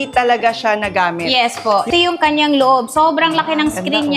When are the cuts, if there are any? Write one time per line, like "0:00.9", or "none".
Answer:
0:01.9